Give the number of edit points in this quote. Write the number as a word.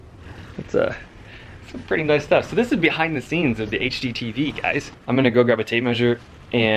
one